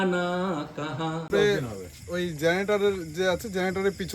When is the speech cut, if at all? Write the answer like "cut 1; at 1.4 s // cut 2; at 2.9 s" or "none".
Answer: cut 1; at 1.3 s